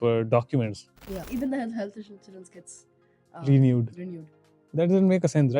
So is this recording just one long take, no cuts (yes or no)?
no